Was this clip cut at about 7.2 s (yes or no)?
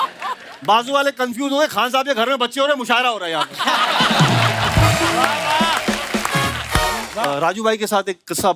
yes